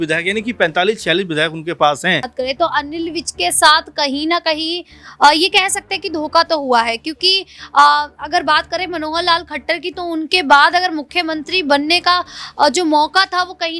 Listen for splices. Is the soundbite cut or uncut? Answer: cut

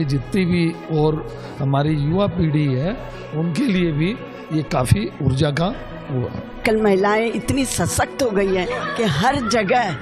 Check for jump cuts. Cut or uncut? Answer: cut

